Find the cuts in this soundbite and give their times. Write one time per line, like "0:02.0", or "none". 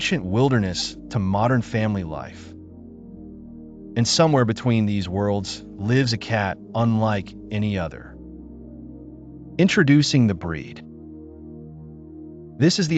0:02.4
0:03.9
0:10.6
0:11.9